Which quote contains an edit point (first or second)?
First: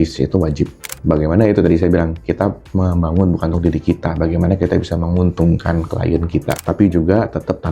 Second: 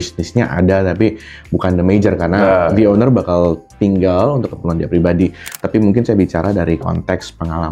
first